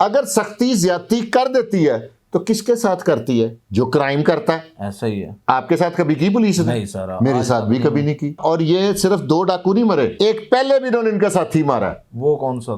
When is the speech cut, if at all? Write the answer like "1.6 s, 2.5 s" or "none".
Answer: 8.4 s, 10.1 s